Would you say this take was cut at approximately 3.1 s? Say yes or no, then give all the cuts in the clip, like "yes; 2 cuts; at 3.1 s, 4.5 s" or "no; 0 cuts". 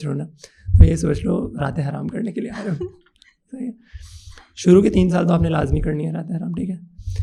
no; 0 cuts